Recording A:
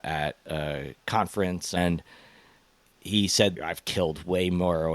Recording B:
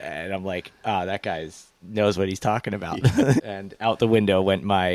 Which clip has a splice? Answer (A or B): A